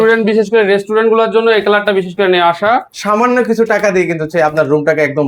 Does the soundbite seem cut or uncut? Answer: cut